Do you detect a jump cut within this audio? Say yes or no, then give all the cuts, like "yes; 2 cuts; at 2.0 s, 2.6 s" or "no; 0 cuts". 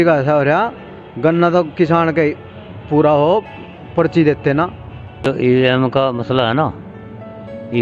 yes; 1 cut; at 5.3 s